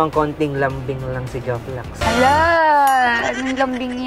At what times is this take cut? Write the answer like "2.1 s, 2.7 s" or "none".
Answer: none